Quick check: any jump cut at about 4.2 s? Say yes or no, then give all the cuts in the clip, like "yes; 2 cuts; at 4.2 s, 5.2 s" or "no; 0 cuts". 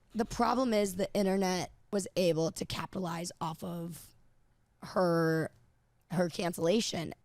no; 1 cut; at 1.7 s